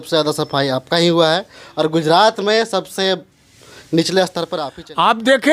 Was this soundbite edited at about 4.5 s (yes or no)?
yes